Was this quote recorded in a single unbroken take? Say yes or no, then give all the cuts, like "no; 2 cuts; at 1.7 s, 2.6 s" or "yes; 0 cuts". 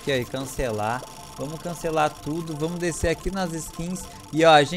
yes; 0 cuts